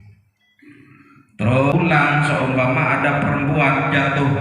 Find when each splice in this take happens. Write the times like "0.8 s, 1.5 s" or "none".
1.7 s